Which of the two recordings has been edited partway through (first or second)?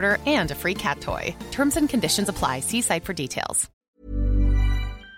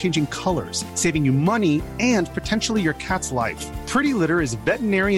first